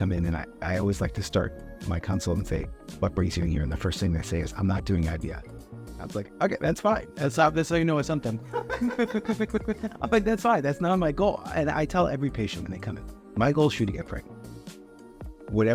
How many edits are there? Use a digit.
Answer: 0